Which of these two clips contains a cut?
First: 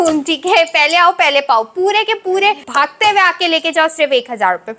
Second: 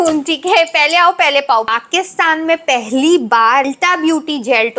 second; 2 cuts; at 1.7 s, 3.7 s

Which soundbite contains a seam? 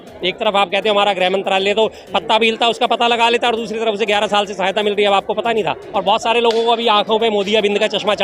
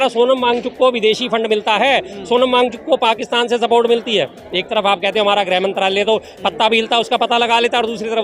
first; 1 cut; at 5.8 s

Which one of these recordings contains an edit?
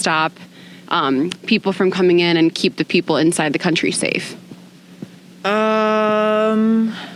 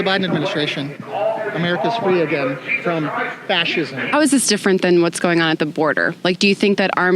second; 1 cut; at 4.1 s

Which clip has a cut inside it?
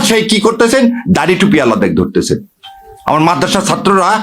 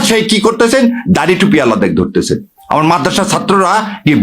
second; 1 cut; at 2.5 s

